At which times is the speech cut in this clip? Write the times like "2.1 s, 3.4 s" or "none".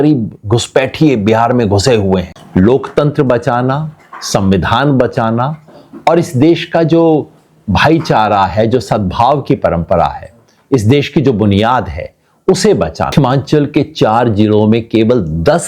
2.4 s, 13.1 s